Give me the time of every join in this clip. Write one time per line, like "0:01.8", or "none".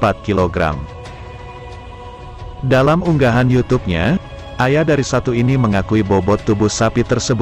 0:01.0
0:02.4